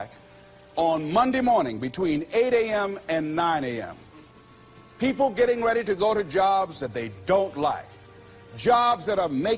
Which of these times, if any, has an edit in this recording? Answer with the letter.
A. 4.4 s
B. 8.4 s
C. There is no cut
C